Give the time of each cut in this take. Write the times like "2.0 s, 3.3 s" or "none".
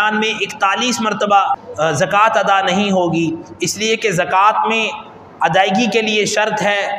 1.6 s